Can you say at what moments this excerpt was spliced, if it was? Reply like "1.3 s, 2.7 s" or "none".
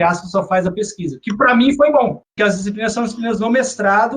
2.3 s